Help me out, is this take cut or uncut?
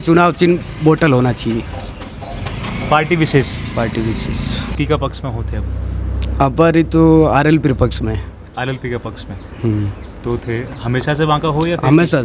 uncut